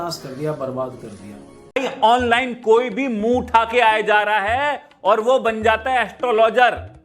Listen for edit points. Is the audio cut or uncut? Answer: cut